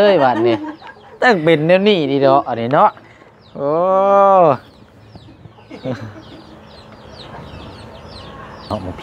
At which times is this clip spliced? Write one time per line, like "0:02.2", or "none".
none

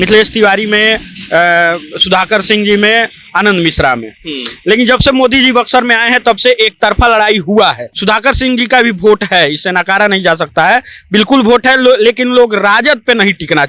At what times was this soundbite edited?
0:07.9

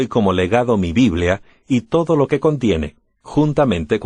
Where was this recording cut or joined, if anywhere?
0:03.1

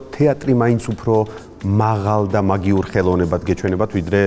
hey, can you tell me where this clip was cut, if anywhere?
none

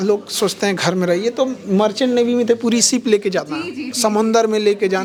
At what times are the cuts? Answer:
none

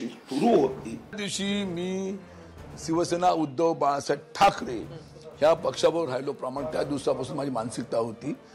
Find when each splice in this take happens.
0:01.2

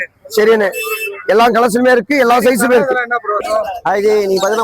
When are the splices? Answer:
0:03.4

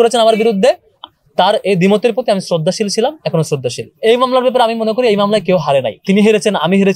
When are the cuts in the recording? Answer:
0:01.1
0:03.9
0:06.0

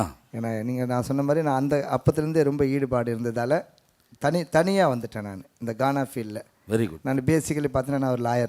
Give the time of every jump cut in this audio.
none

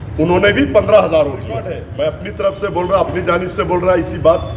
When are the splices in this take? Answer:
0:01.8

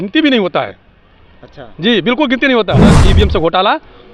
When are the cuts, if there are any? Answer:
0:02.9

